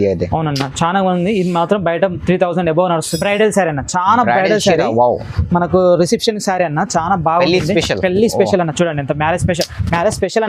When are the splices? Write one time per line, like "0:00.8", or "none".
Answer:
0:03.1